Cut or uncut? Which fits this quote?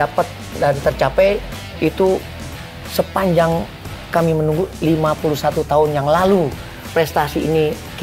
uncut